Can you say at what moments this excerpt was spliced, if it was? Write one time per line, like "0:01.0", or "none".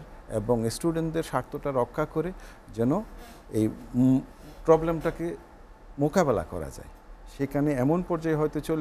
none